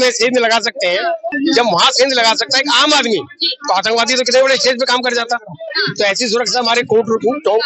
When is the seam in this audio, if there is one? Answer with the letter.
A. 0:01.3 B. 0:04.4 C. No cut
A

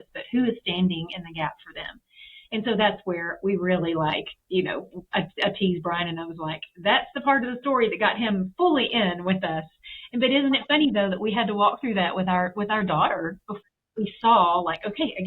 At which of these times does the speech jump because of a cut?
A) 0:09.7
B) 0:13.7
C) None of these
B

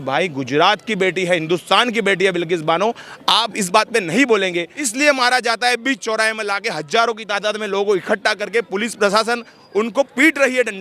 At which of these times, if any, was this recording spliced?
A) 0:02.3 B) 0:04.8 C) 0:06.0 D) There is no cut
B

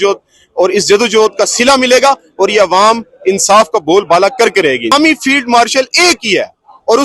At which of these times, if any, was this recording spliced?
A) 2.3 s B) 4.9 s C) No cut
B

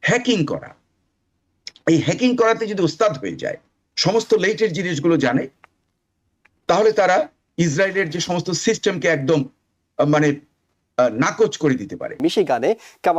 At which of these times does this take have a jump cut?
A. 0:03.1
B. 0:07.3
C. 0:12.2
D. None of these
C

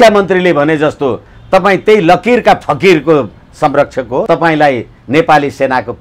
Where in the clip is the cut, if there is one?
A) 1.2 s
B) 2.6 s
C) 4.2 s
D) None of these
C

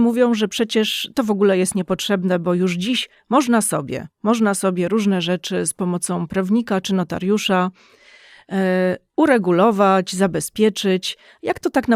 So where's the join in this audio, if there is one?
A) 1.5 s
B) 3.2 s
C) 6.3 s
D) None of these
D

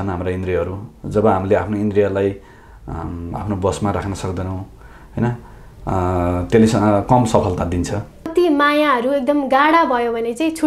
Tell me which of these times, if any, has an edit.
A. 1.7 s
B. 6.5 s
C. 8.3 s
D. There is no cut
C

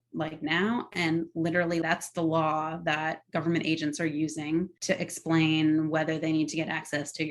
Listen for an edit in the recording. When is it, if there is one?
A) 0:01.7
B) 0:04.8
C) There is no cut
B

